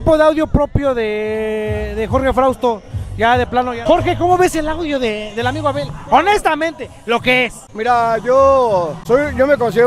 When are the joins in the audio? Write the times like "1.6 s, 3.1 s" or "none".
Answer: 3.8 s